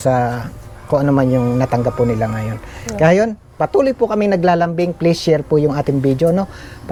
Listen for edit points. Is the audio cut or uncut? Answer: uncut